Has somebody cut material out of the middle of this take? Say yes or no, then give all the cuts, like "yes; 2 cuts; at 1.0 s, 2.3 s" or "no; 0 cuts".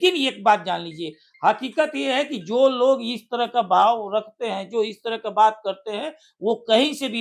no; 0 cuts